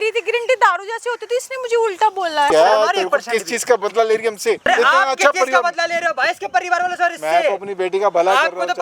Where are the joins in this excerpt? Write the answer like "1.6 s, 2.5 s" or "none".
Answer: 2.5 s, 4.7 s